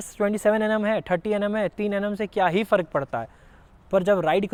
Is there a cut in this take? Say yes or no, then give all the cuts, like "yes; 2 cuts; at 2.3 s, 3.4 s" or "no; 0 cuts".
no; 0 cuts